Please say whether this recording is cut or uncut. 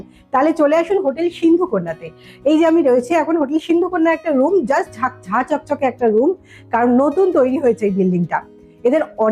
uncut